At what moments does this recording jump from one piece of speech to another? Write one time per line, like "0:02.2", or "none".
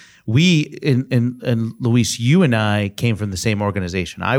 none